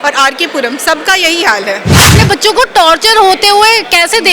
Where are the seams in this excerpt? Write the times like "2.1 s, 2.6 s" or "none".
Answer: 2.0 s